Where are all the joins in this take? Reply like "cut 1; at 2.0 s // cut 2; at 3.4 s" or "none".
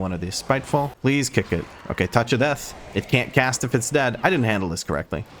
cut 1; at 0.9 s